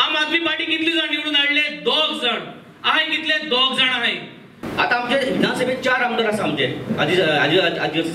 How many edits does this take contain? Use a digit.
1